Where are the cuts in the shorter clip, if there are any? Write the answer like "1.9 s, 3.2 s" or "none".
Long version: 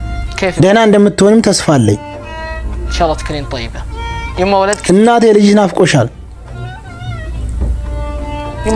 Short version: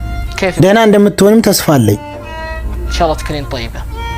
none